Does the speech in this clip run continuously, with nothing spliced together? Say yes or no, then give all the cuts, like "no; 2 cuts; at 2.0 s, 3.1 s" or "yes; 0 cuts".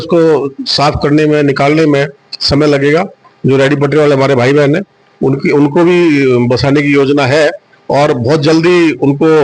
no; 1 cut; at 3.2 s